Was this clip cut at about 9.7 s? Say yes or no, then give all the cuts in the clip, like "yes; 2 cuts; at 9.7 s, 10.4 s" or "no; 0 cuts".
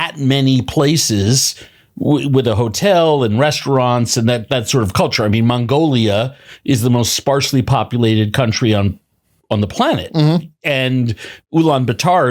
no; 0 cuts